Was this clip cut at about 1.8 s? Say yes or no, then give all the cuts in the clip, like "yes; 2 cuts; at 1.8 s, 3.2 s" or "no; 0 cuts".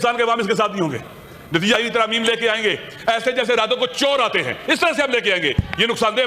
yes; 1 cut; at 1.8 s